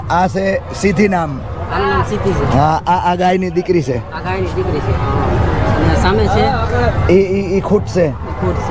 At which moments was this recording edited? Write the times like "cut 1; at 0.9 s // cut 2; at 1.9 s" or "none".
none

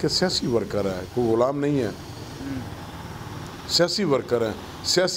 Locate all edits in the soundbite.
none

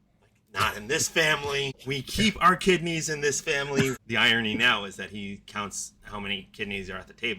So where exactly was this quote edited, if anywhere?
cut 1; at 1.8 s // cut 2; at 4.0 s

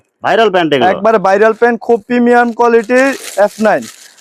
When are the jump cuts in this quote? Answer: none

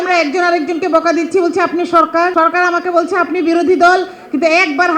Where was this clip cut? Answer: cut 1; at 2.3 s

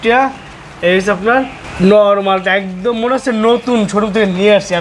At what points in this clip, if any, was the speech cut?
cut 1; at 1.6 s

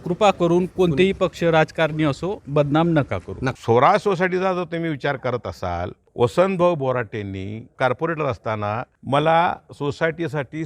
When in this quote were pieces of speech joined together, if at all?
cut 1; at 3.5 s // cut 2; at 6.0 s // cut 3; at 7.8 s // cut 4; at 8.9 s

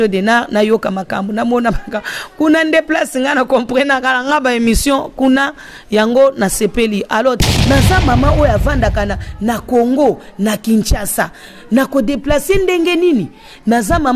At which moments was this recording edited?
cut 1; at 7.4 s

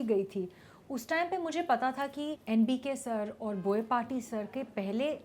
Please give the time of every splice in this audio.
cut 1; at 2.4 s

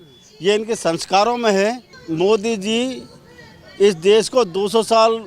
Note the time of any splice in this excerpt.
cut 1; at 2.0 s

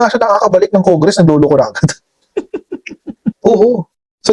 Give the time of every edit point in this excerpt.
cut 1; at 3.3 s

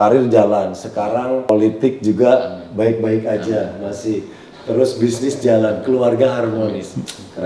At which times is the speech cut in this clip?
cut 1; at 1.5 s

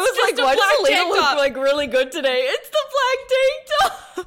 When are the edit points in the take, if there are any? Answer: none

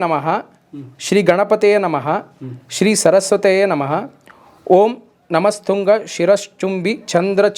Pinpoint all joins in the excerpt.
none

